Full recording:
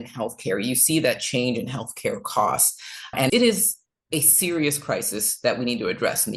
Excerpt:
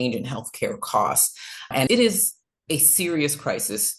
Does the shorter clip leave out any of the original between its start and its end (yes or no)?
no